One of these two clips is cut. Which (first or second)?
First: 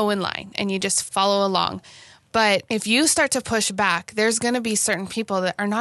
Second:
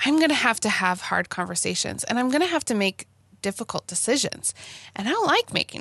first